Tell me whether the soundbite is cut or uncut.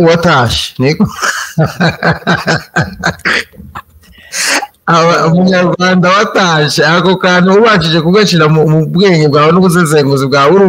uncut